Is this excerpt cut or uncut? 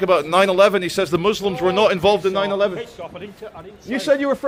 uncut